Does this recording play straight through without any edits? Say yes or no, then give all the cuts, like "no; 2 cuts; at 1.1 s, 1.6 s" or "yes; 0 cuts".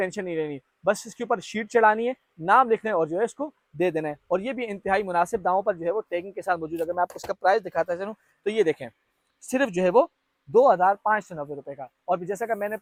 yes; 0 cuts